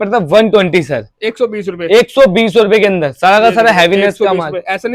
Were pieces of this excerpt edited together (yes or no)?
no